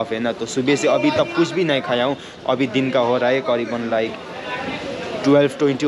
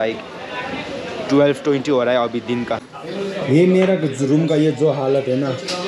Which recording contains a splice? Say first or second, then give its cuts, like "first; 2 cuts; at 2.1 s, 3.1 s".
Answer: second; 1 cut; at 2.8 s